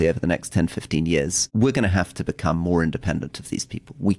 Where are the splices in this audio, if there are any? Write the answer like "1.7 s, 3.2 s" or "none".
1.4 s